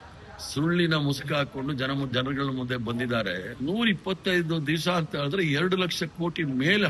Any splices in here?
yes; 1 cut; at 3.5 s

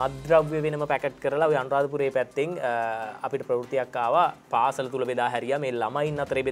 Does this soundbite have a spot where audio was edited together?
no; 0 cuts

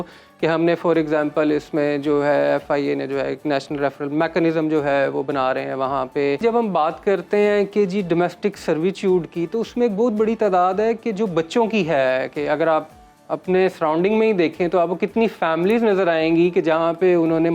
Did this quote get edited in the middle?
yes; 1 cut; at 6.4 s

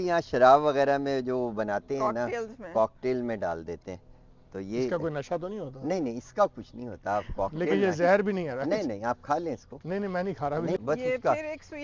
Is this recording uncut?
yes; 0 cuts

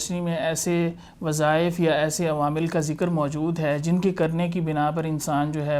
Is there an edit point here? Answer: no; 0 cuts

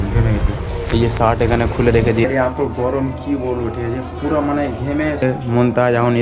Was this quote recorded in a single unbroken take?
no; 2 cuts; at 2.2 s, 5.2 s

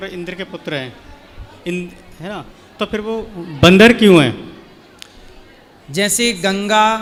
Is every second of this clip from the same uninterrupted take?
yes; 0 cuts

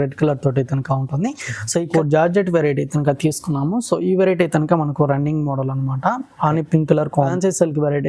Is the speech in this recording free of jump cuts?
no; 2 cuts; at 1.9 s, 7.1 s

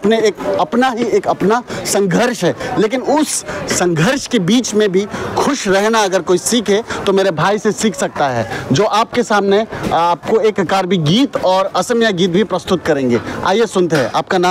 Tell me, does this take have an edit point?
no; 0 cuts

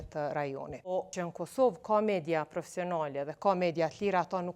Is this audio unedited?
no; 1 cut; at 0.9 s

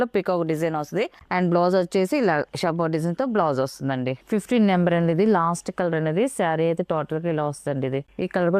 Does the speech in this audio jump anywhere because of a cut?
yes; 2 cuts; at 1.2 s, 4.2 s

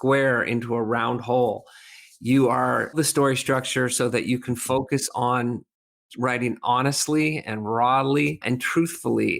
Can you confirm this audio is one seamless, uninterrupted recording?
no; 2 cuts; at 2.9 s, 8.4 s

